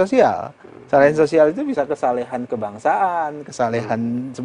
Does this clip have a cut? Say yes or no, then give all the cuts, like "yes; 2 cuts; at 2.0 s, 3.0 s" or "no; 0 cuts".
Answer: no; 0 cuts